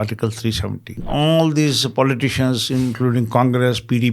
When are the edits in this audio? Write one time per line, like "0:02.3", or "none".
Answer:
0:01.0